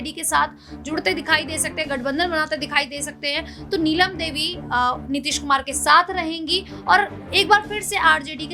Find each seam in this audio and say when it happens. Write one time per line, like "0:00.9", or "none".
none